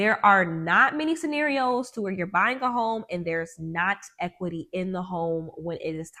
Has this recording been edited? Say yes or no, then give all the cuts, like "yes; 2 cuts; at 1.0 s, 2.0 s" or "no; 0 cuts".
no; 0 cuts